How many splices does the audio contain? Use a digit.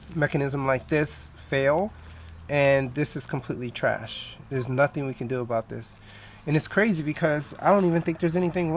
0